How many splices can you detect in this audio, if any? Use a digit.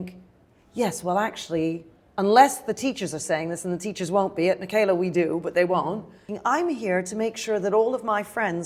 1